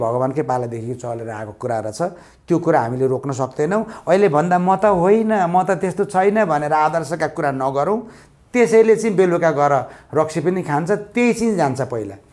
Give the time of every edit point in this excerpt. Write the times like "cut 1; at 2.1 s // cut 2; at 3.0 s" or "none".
none